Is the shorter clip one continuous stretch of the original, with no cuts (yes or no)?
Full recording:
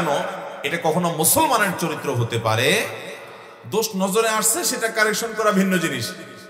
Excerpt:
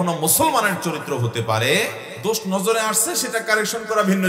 no